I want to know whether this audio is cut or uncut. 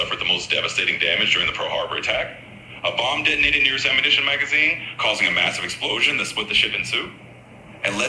uncut